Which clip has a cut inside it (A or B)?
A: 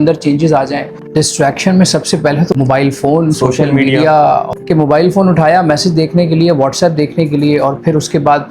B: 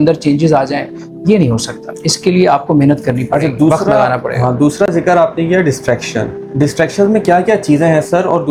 A